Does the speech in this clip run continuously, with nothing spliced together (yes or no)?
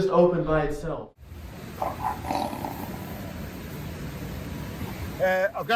no